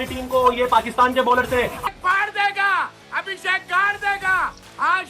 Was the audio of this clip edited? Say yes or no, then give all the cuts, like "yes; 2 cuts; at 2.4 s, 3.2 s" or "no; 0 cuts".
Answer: yes; 1 cut; at 2.0 s